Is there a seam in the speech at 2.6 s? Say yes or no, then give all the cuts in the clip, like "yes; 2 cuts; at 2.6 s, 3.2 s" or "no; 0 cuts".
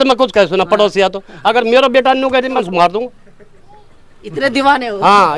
yes; 1 cut; at 2.6 s